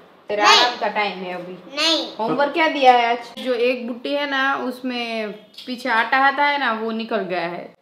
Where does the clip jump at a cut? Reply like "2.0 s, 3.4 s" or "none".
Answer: 3.4 s